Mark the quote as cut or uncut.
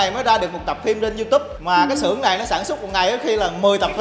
uncut